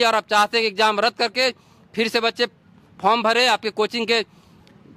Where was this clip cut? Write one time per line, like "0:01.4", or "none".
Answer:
none